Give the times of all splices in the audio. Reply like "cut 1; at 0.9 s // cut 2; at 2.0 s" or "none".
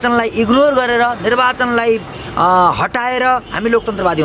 none